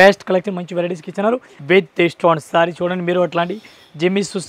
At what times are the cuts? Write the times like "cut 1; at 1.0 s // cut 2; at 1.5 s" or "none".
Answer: cut 1; at 1.5 s